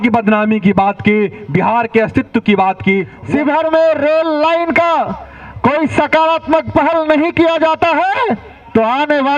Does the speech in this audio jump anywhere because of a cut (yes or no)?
yes